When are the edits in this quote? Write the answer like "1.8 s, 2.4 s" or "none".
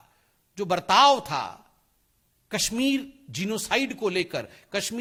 none